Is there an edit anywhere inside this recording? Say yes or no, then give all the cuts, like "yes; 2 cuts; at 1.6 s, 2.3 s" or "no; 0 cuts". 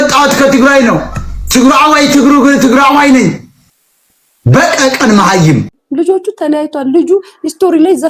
yes; 1 cut; at 5.8 s